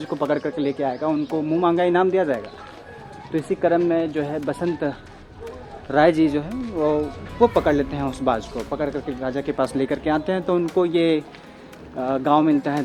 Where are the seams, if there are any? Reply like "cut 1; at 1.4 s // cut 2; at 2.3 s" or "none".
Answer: none